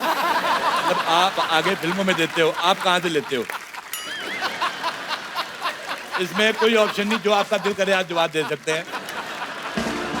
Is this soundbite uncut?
yes; 0 cuts

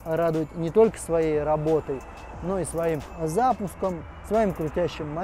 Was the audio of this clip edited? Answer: no; 0 cuts

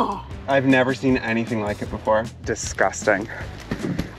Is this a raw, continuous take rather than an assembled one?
no; 1 cut; at 2.5 s

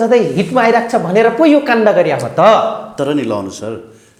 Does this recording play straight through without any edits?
yes; 0 cuts

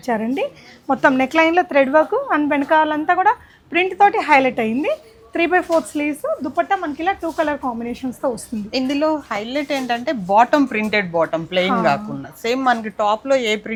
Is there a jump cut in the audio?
no; 0 cuts

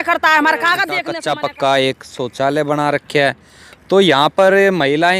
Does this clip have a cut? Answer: yes; 1 cut; at 1.1 s

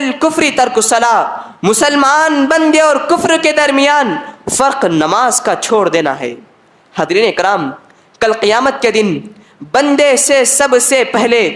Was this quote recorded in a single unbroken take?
yes; 0 cuts

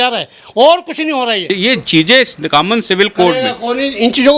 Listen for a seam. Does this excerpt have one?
yes; 1 cut; at 1.5 s

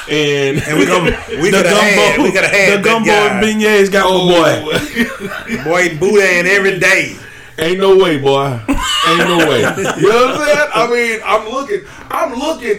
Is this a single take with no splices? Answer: yes; 0 cuts

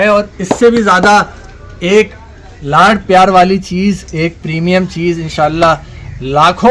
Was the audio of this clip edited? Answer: no; 0 cuts

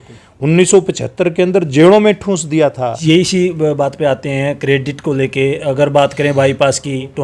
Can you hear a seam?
yes; 1 cut; at 2.9 s

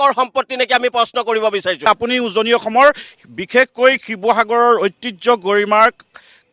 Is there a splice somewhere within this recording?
yes; 1 cut; at 1.9 s

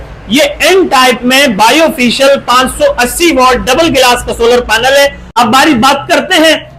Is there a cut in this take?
yes; 1 cut; at 5.2 s

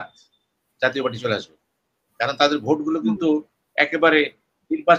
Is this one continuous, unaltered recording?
yes; 0 cuts

